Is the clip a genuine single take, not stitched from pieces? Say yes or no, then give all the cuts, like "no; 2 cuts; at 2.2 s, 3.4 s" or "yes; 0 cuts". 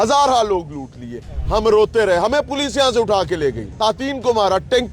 no; 1 cut; at 3.8 s